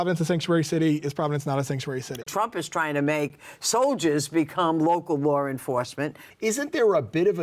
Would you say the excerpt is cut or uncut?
cut